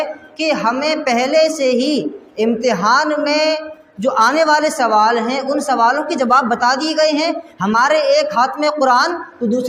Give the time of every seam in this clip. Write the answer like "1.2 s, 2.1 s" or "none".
none

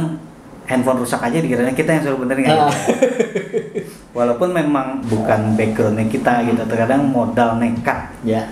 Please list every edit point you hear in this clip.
5.0 s

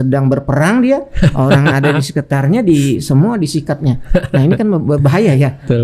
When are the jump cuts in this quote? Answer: none

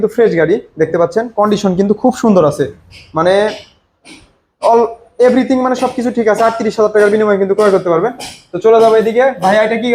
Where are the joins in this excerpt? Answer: none

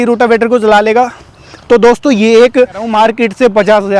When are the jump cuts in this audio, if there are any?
2.9 s

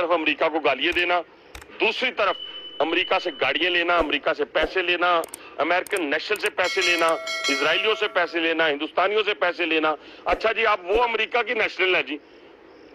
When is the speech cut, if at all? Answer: none

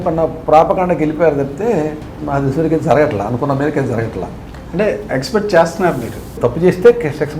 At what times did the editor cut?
6.4 s

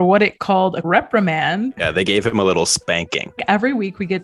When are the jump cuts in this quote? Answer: 0.8 s, 1.8 s, 3.4 s

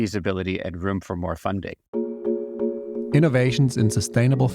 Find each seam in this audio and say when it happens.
1.8 s

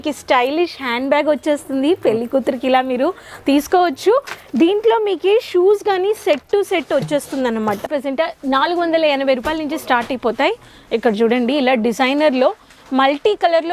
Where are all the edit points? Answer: 7.8 s

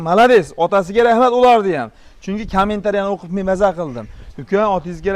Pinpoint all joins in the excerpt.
none

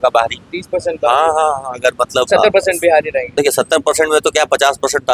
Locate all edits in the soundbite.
2.3 s, 3.2 s

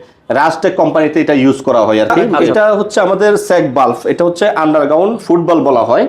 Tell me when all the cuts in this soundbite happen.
2.4 s

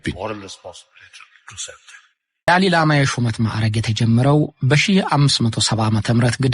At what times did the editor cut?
2.5 s

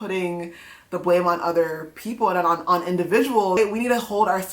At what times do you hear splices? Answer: 3.6 s

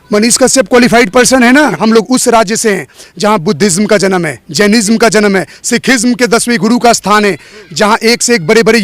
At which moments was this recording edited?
1.8 s

